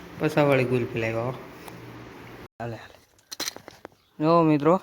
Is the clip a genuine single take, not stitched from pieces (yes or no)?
no